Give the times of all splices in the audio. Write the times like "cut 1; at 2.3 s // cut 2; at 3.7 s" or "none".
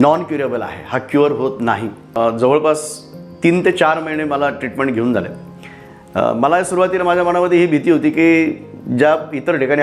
cut 1; at 2.0 s